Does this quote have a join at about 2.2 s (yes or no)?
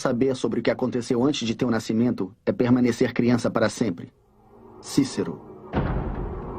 yes